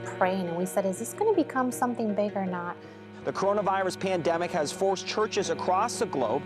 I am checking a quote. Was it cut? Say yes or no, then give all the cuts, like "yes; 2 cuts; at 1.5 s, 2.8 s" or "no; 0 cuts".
yes; 1 cut; at 3.1 s